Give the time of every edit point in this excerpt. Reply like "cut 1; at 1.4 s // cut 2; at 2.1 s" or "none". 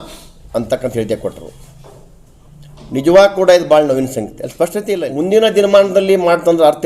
cut 1; at 4.8 s